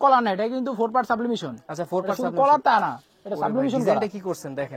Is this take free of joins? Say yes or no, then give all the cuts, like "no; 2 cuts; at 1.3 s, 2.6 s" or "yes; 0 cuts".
yes; 0 cuts